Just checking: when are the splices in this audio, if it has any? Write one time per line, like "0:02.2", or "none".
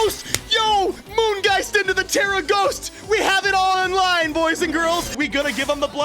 0:05.1